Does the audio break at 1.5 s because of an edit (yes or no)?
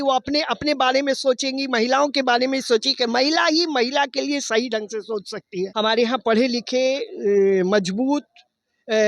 no